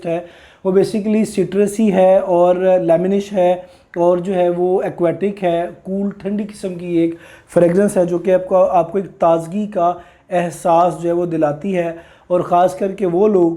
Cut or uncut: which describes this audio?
uncut